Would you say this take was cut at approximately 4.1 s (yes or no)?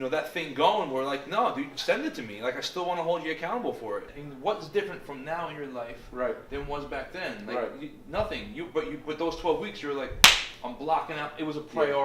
yes